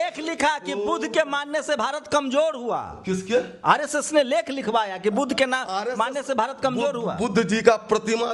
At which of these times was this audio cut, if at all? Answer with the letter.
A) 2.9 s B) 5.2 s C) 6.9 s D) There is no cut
D